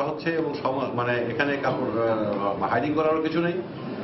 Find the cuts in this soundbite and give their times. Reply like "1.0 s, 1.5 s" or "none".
none